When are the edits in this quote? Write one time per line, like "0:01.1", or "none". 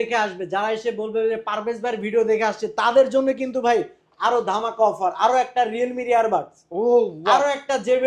none